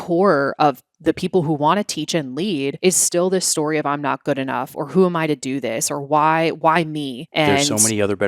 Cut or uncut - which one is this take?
cut